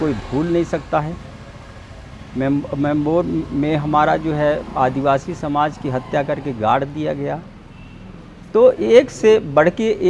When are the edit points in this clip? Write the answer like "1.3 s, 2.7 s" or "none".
none